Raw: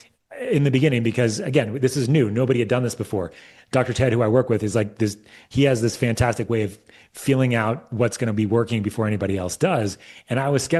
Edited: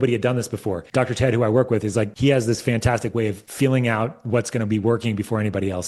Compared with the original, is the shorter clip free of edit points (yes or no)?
no